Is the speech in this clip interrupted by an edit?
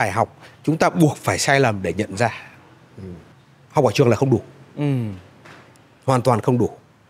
yes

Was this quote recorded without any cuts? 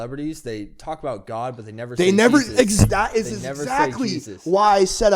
yes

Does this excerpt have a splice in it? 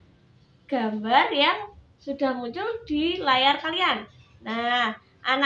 no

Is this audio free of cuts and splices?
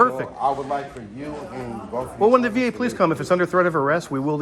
yes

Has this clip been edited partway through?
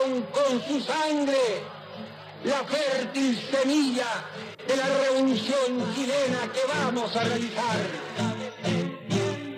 yes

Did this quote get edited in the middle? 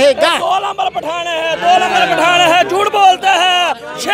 no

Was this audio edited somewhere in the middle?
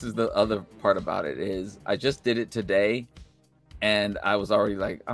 no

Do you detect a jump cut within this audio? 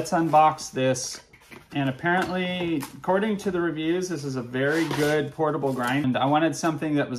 yes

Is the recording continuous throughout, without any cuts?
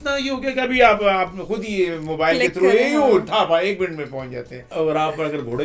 no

